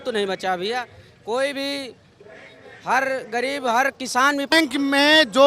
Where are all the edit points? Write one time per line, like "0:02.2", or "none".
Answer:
0:04.5